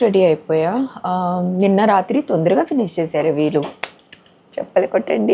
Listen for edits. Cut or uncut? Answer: uncut